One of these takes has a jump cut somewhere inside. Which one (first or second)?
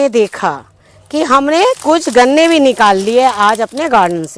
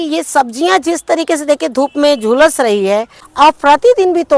second